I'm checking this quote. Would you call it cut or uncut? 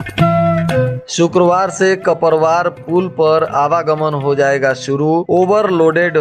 cut